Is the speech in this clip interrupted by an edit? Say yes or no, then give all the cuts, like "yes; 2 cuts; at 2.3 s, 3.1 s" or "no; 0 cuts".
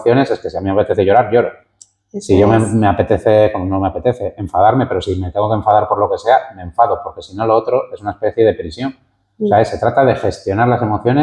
no; 0 cuts